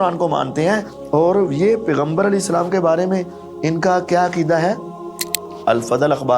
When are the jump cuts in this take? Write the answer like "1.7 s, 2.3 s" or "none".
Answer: 0.9 s